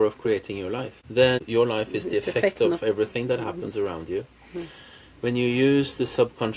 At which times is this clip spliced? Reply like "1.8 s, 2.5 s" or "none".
1.4 s